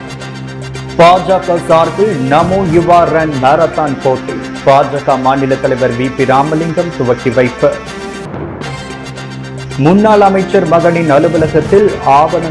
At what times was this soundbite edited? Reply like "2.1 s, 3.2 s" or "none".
0.9 s